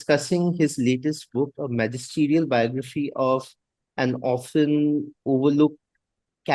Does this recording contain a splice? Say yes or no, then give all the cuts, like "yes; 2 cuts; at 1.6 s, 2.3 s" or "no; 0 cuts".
no; 0 cuts